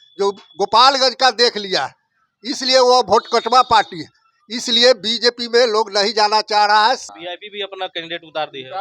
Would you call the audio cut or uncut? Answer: cut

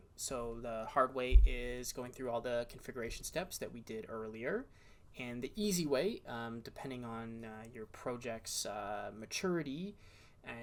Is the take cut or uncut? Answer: uncut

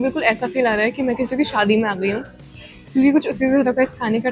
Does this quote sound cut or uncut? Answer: uncut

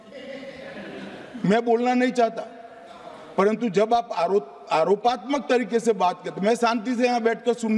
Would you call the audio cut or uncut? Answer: uncut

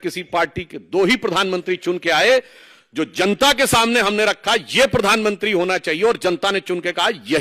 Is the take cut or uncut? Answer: uncut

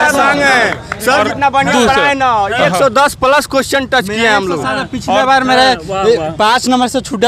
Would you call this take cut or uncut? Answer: uncut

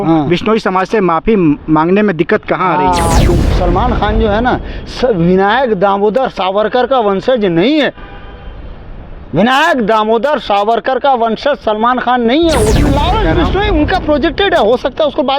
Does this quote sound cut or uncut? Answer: cut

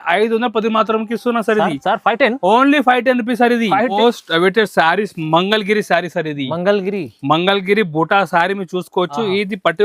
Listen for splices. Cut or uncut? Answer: cut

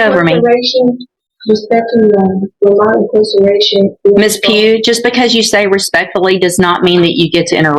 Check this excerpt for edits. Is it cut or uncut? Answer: uncut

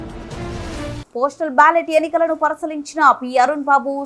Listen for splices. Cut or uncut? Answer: cut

